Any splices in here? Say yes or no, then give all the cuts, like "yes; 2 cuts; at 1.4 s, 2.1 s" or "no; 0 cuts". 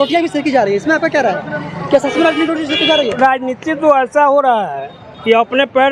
no; 0 cuts